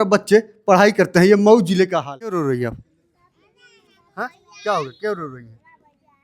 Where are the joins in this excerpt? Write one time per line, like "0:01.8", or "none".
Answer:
0:02.4